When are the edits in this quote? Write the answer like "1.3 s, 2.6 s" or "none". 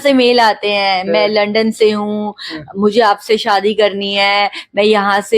none